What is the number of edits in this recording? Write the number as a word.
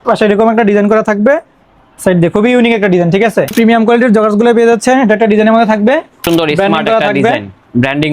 two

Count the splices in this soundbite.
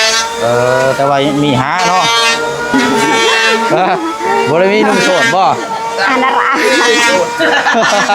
one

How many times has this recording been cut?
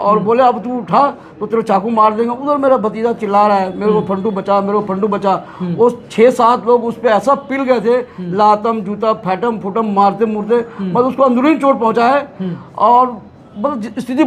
zero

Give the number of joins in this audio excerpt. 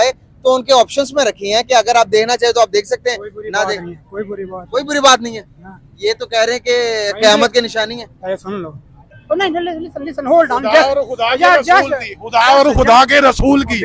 one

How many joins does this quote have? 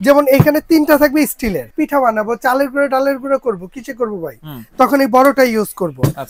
one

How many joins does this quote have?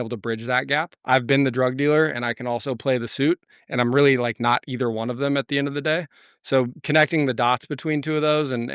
one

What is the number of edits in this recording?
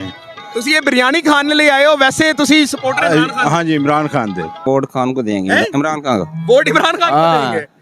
one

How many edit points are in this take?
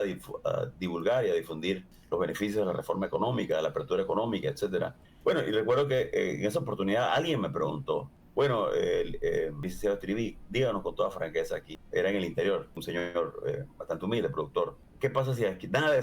seven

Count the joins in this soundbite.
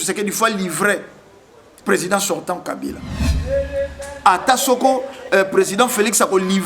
one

